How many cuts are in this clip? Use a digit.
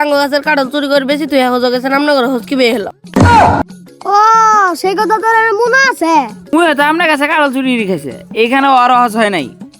1